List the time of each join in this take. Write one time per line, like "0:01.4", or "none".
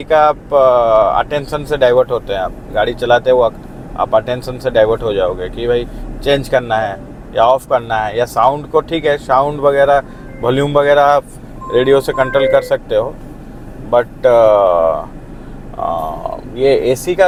none